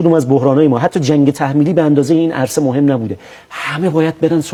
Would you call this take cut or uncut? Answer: uncut